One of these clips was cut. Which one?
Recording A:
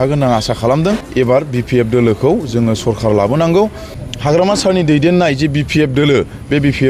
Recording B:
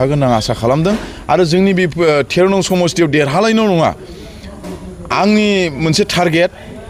A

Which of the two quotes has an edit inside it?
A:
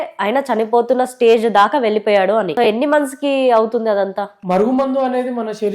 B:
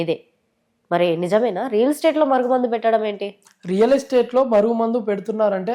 A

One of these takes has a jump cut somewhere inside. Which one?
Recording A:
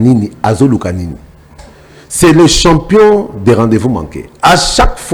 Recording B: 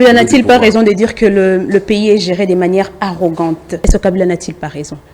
B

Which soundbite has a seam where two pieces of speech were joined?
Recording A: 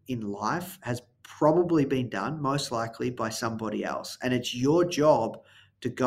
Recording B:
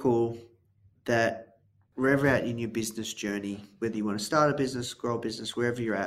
B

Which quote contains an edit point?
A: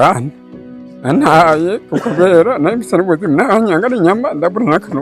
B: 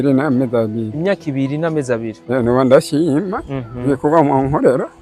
B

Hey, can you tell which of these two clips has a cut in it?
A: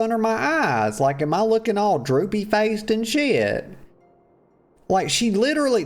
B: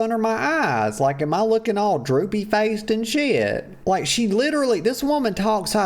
B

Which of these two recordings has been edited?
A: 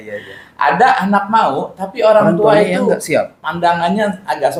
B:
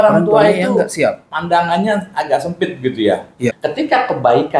B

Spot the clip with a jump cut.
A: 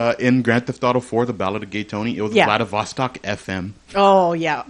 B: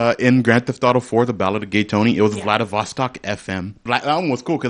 B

